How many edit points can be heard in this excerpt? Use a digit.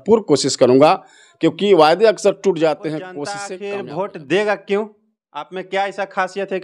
1